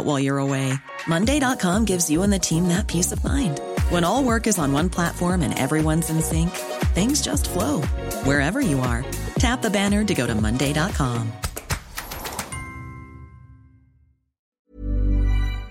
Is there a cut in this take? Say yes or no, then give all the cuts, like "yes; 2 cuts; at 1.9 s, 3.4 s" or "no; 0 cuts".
yes; 1 cut; at 14.6 s